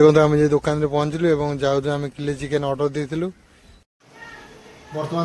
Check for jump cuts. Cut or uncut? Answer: cut